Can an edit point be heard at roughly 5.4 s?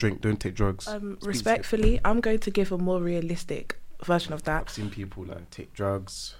yes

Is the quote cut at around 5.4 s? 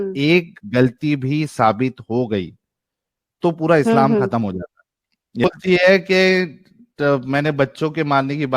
yes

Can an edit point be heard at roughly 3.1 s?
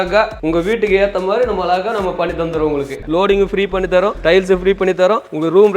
yes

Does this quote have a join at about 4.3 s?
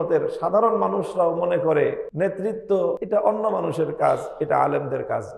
no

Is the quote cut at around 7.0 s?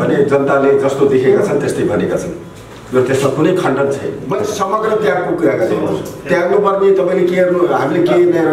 no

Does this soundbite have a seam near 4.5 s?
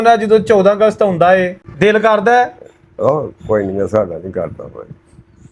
no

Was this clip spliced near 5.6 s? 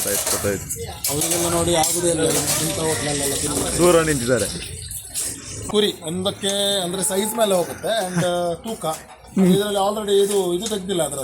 yes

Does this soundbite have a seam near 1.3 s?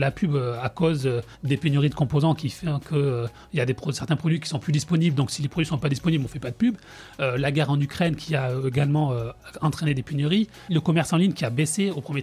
no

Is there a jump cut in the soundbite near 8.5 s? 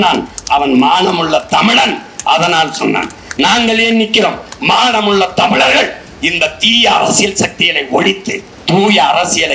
yes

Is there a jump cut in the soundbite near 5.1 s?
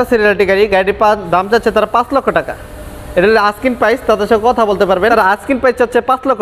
yes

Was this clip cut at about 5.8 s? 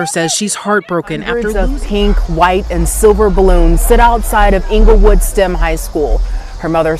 no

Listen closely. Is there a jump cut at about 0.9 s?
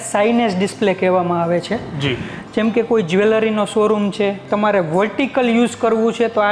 no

